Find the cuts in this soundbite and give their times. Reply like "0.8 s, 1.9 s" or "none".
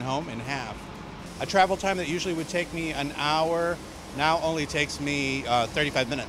1.5 s